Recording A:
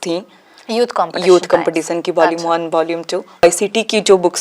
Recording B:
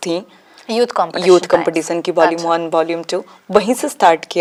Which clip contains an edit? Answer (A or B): A